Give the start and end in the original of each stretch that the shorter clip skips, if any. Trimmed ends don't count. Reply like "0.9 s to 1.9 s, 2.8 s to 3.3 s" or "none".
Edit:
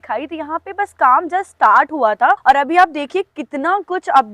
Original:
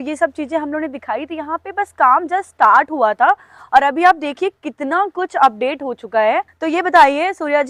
3.4 s to 3.7 s